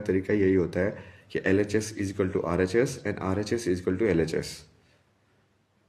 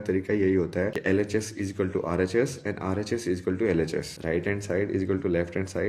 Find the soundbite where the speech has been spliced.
second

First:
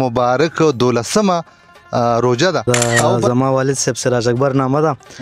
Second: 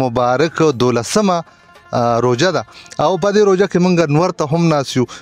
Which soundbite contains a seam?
first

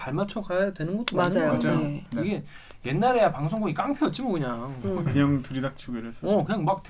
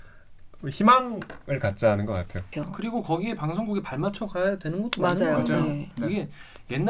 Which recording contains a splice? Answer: second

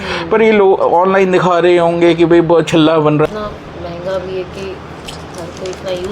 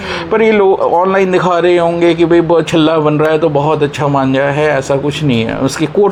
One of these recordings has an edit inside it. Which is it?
first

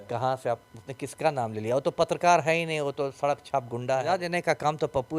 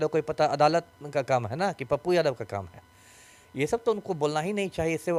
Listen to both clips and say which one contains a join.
first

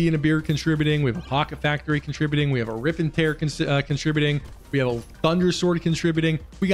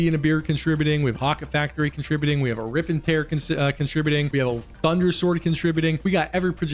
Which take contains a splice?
second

